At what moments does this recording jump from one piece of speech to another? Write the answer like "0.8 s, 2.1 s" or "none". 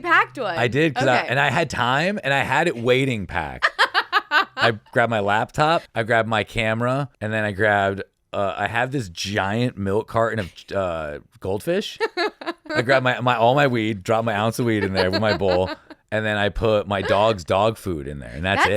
5.9 s, 7.1 s, 12.6 s